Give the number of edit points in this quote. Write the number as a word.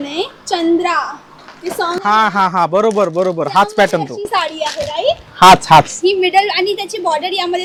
zero